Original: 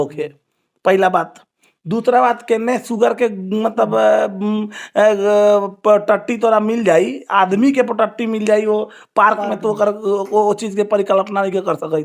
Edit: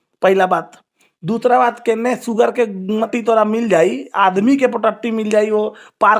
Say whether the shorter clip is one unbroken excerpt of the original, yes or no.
no